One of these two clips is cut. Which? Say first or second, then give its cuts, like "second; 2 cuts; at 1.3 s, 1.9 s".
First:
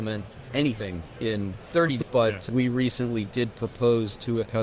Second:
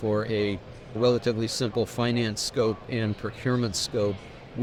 first; 1 cut; at 2.0 s